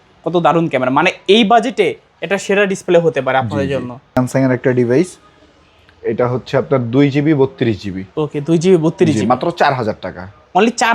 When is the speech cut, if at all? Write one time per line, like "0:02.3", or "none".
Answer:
0:04.1